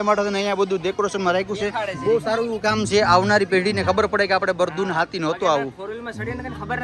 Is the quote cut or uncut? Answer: uncut